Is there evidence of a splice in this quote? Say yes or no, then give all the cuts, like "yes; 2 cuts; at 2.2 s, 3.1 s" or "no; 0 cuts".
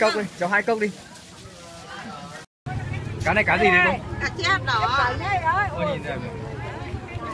yes; 1 cut; at 2.6 s